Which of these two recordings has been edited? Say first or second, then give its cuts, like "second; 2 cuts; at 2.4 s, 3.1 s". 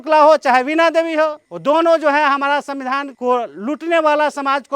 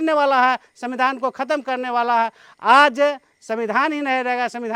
first; 2 cuts; at 1.5 s, 3.1 s